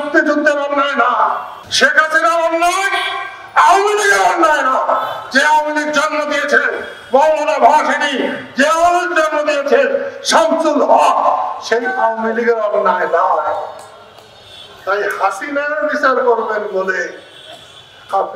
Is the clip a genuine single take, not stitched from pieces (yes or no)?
no